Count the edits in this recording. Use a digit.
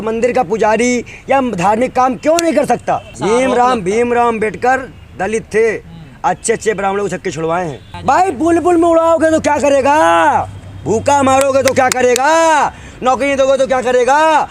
2